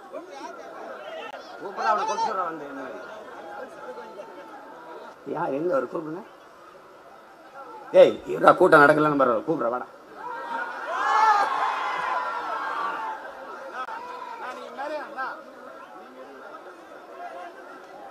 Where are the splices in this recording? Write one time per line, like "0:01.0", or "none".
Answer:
0:05.1